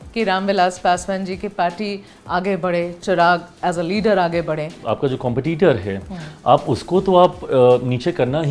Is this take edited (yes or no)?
yes